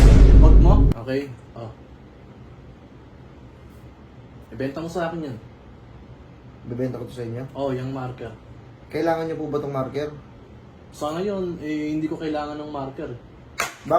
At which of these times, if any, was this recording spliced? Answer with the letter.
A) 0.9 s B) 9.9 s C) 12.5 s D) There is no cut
A